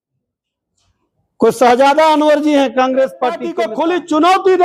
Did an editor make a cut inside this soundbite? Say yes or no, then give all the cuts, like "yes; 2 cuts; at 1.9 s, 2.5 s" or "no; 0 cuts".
yes; 1 cut; at 3.5 s